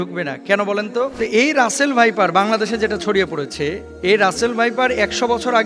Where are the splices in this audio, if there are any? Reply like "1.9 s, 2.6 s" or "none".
1.1 s, 3.9 s

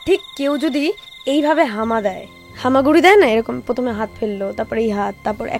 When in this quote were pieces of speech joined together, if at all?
1.0 s

